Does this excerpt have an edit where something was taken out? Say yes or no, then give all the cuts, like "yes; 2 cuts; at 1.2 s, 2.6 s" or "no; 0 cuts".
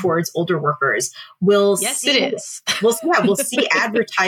no; 0 cuts